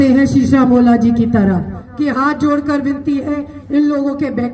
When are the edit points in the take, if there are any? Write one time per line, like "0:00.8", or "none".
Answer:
0:01.8